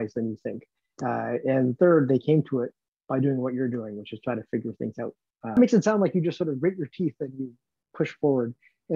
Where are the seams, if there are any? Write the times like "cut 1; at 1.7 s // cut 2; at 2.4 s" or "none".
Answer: cut 1; at 5.5 s